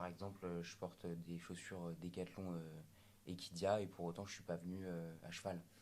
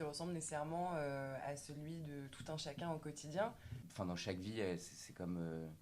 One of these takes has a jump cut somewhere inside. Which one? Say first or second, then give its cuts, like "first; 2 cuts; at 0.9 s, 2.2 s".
second; 1 cut; at 3.7 s